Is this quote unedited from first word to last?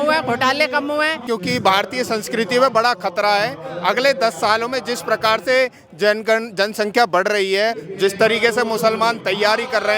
no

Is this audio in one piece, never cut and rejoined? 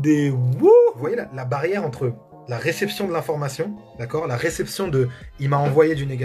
no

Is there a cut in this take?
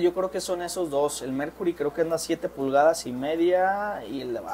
no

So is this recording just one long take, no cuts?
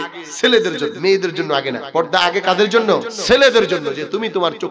no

